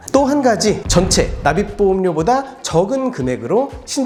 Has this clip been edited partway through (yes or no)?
no